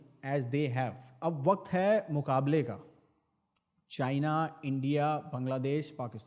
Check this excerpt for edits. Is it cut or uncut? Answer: cut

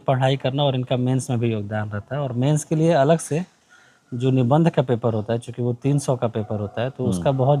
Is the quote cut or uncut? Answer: uncut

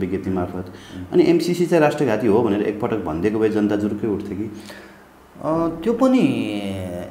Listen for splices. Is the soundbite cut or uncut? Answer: uncut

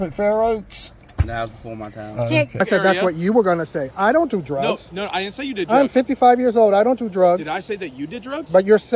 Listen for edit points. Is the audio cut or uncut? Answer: cut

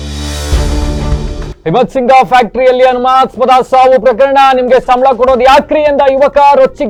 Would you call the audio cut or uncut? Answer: uncut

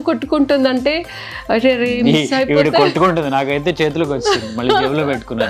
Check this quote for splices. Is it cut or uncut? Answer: uncut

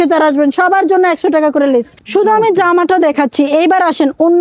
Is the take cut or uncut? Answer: cut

